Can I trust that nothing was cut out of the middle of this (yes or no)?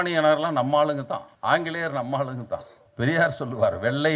no